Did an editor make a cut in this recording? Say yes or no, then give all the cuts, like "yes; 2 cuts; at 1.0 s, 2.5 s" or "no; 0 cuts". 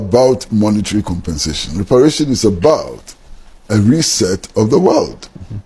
no; 0 cuts